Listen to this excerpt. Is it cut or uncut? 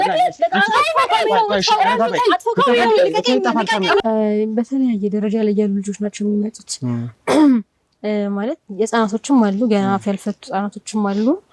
cut